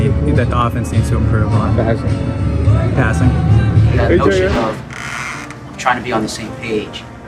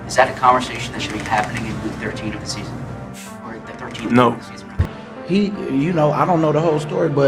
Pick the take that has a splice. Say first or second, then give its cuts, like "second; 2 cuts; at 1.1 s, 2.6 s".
second; 1 cut; at 4.8 s